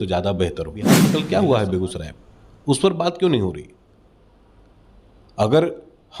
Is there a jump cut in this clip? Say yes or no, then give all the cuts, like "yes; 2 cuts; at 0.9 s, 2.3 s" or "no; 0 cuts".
yes; 1 cut; at 1.0 s